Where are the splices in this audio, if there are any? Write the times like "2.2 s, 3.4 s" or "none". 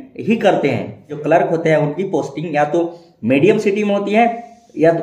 1.1 s